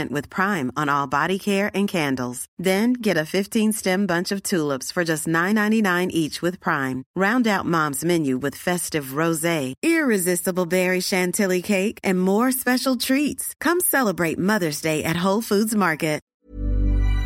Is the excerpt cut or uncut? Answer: cut